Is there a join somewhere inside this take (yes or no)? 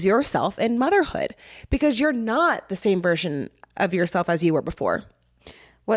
no